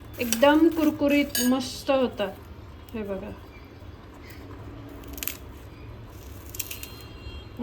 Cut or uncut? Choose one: uncut